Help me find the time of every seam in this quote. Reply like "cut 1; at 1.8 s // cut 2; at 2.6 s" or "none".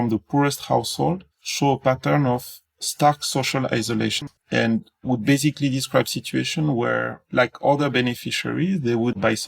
cut 1; at 4.4 s